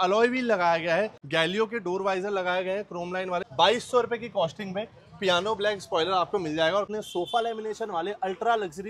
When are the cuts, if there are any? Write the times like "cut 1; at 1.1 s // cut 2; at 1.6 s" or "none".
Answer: cut 1; at 1.2 s // cut 2; at 3.5 s // cut 3; at 6.9 s